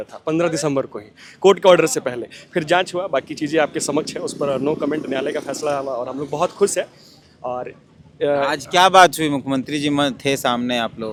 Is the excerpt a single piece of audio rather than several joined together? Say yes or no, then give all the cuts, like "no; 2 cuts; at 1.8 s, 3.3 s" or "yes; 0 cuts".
yes; 0 cuts